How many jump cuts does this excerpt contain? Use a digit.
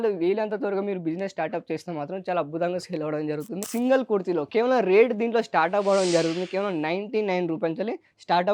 1